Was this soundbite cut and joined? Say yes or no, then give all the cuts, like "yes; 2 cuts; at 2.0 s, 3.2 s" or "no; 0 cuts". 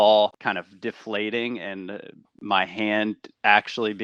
no; 0 cuts